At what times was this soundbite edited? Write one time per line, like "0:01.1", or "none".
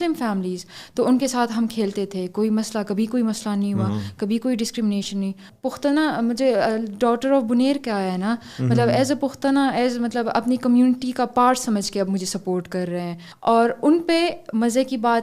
0:05.5
0:13.3